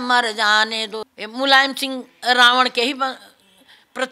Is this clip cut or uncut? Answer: cut